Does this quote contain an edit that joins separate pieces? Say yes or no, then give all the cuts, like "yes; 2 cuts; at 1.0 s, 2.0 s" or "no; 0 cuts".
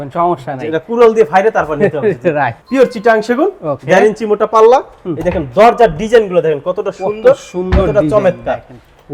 no; 0 cuts